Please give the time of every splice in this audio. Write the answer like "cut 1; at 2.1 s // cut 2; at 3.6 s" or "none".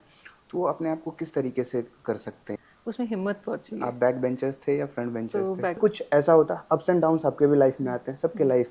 cut 1; at 2.6 s // cut 2; at 5.8 s